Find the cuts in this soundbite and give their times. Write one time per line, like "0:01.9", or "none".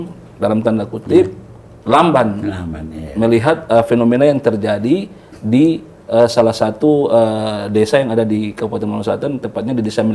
none